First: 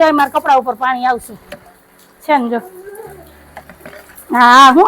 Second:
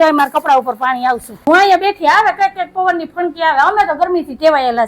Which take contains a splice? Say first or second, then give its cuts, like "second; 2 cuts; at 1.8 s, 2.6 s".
second; 1 cut; at 1.5 s